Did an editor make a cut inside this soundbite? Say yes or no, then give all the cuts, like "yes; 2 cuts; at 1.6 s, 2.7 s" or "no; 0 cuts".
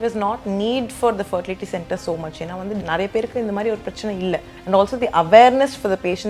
yes; 2 cuts; at 2.8 s, 4.5 s